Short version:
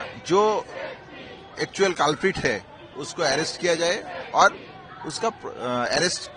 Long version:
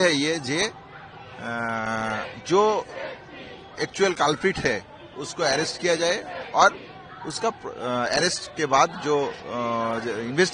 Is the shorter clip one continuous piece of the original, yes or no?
yes